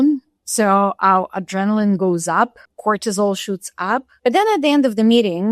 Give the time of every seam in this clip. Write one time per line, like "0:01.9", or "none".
0:02.7
0:04.1